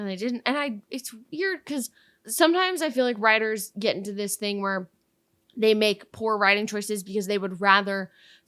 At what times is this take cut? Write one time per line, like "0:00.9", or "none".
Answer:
0:02.3